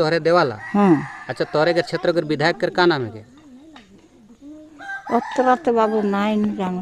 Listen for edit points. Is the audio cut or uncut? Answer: uncut